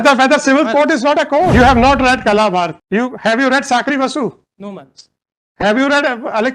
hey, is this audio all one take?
no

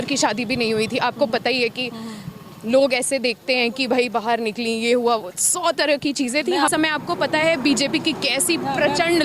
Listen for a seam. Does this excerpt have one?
yes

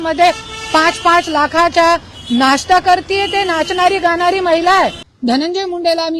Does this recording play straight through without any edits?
no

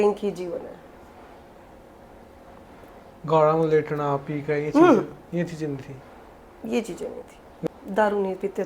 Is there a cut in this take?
yes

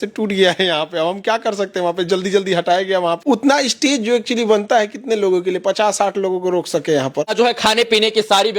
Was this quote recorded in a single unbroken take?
no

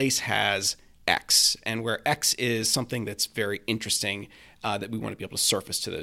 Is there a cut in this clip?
no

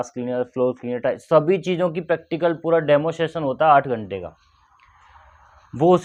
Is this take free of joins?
yes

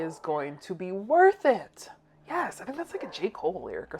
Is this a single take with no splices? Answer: yes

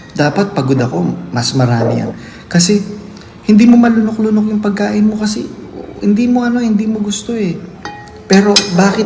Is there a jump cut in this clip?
no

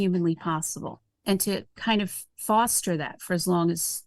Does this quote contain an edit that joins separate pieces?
yes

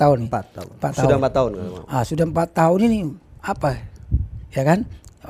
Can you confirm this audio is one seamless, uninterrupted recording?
yes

